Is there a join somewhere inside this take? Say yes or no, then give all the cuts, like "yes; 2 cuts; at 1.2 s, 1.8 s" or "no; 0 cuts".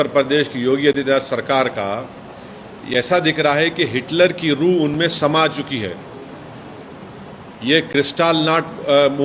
no; 0 cuts